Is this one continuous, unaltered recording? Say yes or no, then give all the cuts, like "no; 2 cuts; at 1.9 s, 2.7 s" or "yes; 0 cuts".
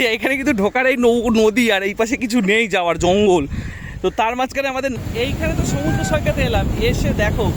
no; 1 cut; at 4.9 s